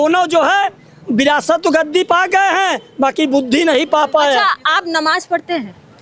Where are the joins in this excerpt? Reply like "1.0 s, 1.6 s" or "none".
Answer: none